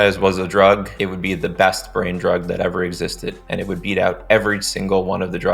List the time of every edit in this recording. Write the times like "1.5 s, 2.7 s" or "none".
0.9 s